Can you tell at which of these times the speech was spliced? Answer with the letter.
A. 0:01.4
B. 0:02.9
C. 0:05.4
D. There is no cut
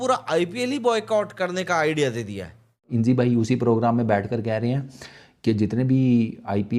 B